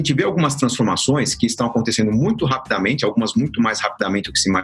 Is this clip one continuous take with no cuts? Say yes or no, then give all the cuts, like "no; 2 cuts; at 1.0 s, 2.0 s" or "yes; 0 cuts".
yes; 0 cuts